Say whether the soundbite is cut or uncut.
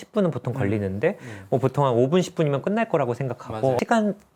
uncut